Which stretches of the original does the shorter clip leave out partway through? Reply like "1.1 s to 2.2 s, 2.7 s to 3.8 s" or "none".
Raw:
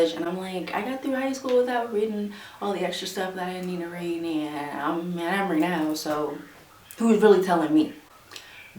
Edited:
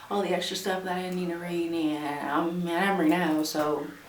none